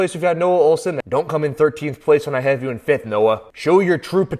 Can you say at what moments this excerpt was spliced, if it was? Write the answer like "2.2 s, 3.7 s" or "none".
1.0 s